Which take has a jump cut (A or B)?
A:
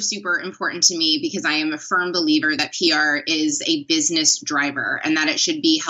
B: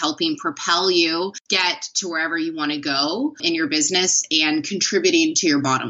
B